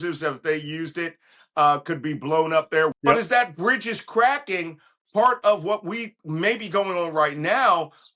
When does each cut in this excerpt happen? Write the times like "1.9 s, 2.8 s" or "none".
2.9 s